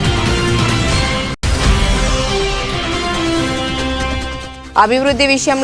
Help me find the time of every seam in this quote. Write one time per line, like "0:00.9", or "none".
0:01.2